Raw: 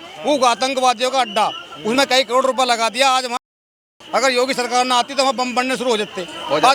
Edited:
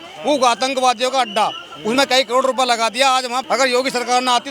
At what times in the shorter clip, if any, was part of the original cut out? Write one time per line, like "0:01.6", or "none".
0:03.4